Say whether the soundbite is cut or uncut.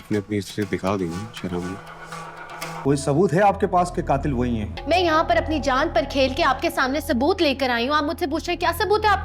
cut